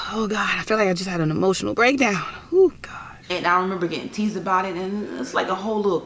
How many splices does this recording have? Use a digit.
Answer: 1